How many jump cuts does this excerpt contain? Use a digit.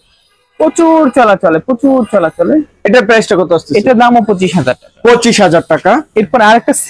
0